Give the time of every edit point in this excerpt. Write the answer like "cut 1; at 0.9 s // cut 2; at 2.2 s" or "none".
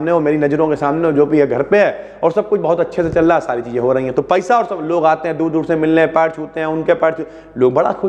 none